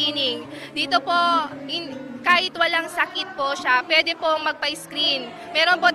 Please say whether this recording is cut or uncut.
cut